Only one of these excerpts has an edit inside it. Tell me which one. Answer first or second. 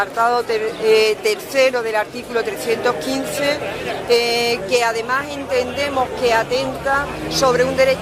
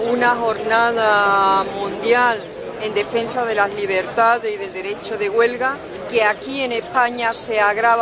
first